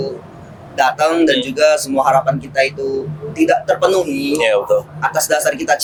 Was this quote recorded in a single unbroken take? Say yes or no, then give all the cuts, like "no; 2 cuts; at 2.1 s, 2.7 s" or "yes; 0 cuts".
yes; 0 cuts